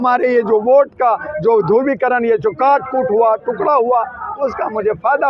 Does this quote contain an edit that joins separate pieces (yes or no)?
no